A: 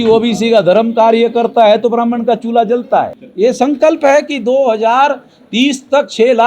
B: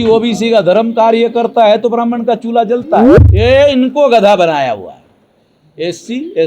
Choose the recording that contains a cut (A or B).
B